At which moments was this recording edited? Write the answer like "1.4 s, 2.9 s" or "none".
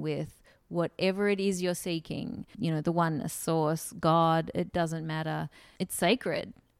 2.5 s, 5.6 s